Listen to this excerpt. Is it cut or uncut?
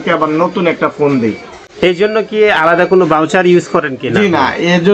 uncut